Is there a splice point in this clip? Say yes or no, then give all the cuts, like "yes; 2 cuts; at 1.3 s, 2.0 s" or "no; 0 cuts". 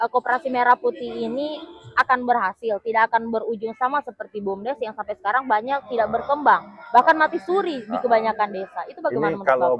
no; 0 cuts